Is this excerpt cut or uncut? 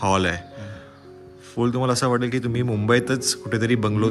uncut